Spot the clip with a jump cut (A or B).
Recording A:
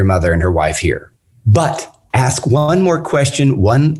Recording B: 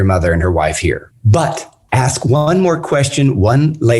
B